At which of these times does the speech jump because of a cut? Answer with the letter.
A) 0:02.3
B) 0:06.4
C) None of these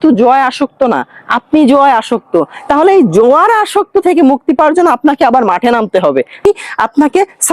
B